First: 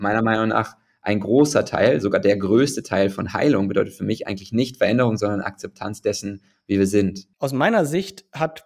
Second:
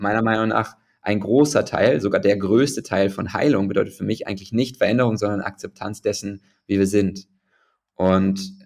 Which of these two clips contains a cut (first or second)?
first